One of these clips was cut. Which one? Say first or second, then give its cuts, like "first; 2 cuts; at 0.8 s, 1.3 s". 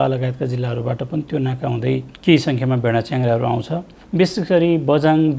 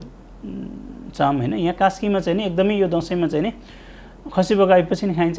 first; 2 cuts; at 2.1 s, 3.9 s